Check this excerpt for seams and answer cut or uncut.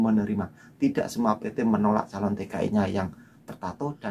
uncut